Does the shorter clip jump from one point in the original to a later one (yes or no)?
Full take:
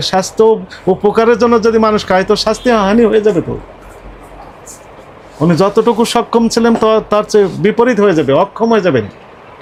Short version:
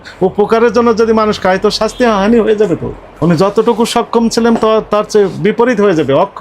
yes